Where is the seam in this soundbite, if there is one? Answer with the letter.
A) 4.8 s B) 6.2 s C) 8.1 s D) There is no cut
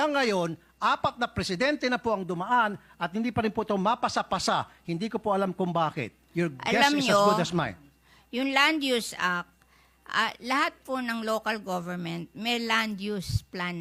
D